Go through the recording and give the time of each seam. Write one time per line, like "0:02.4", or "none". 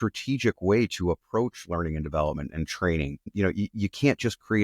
0:03.3